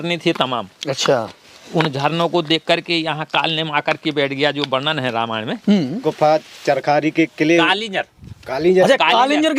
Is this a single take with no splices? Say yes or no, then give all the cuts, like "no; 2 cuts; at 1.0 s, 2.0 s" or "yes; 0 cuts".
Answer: no; 1 cut; at 6.0 s